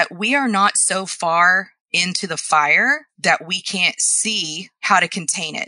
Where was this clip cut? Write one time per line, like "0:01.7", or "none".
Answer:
0:04.7